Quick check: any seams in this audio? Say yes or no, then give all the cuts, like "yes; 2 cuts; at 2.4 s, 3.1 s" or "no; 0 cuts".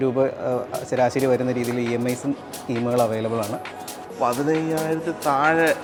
no; 0 cuts